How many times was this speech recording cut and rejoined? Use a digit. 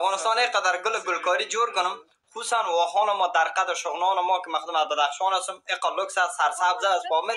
0